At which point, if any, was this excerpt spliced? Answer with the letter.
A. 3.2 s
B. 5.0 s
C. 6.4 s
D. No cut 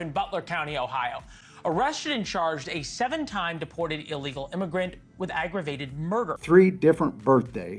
C